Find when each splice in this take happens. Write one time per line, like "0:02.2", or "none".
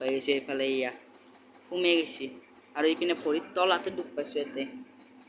none